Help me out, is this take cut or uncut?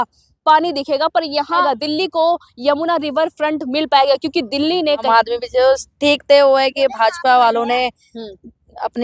cut